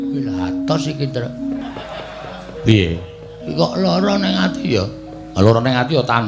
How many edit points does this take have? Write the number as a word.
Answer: one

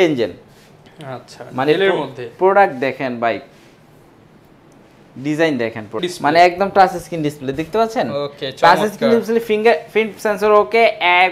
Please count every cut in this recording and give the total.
one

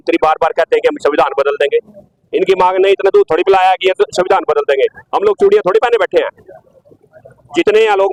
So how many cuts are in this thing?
zero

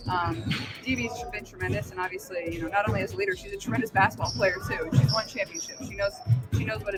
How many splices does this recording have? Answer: zero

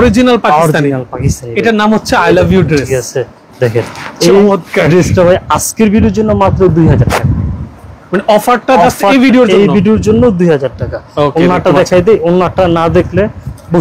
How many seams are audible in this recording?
zero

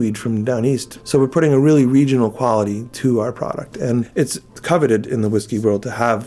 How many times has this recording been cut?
two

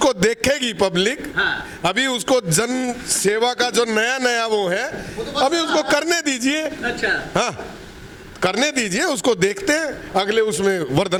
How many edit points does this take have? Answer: zero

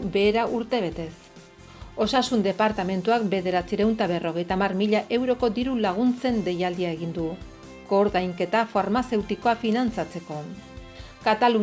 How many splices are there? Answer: zero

